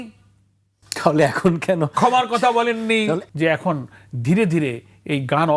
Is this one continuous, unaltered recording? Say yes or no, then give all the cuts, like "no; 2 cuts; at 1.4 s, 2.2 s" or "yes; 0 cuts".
no; 1 cut; at 3.2 s